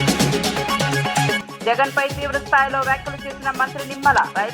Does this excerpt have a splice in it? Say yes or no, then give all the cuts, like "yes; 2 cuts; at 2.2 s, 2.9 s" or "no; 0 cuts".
yes; 1 cut; at 1.4 s